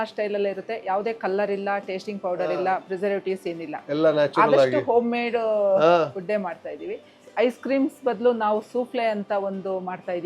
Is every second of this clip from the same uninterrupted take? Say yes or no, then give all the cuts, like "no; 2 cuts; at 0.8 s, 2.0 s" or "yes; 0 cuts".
yes; 0 cuts